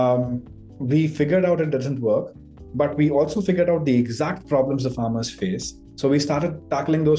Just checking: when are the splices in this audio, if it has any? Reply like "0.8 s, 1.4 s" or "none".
none